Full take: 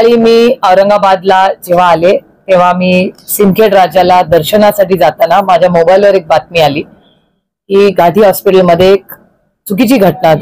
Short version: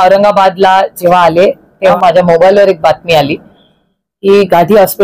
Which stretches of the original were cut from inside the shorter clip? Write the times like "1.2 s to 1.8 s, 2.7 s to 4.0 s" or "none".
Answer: 2.6 s to 5.4 s